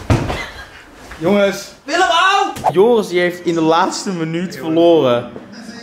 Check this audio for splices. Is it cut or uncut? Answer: cut